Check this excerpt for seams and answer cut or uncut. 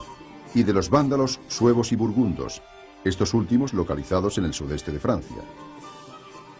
cut